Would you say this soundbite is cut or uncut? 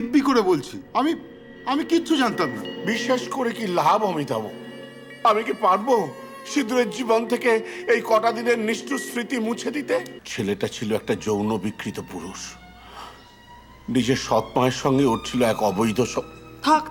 cut